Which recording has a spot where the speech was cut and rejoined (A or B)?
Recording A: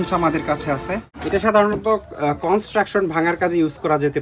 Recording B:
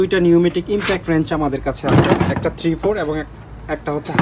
A